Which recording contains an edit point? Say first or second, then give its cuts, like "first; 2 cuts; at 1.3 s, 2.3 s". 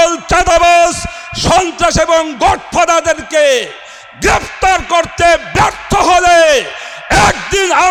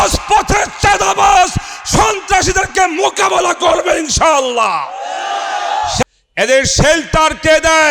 second; 1 cut; at 6.0 s